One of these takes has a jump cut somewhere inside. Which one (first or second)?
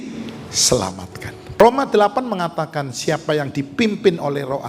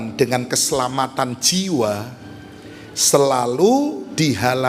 first